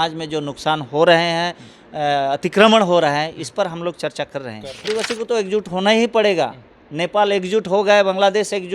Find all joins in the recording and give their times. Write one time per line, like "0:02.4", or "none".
0:04.9